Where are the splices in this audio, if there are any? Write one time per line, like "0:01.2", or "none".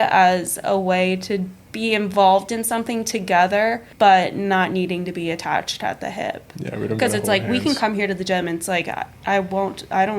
0:01.6
0:03.8